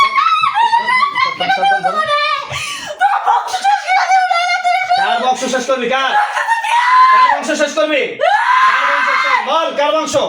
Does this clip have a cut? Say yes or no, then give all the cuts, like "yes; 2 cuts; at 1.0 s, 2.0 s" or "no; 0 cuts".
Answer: no; 0 cuts